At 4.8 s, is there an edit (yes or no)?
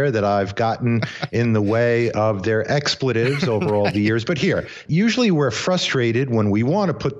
yes